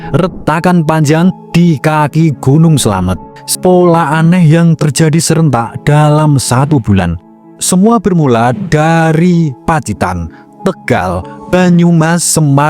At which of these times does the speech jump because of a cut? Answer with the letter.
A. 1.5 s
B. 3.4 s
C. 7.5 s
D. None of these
B